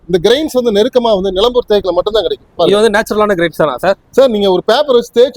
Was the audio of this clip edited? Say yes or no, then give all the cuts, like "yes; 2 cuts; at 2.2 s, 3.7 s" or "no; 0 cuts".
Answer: no; 0 cuts